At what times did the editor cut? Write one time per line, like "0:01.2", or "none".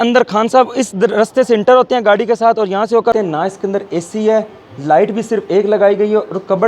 0:03.1